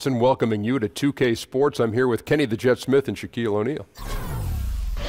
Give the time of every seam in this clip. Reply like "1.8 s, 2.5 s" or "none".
4.0 s